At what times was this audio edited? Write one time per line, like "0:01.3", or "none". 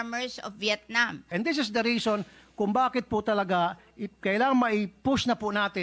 0:01.3